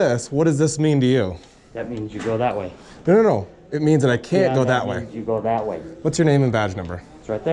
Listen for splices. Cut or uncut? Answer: uncut